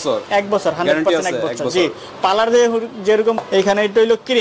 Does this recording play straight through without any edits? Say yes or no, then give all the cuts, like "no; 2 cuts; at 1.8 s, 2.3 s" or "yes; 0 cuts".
no; 1 cut; at 3.4 s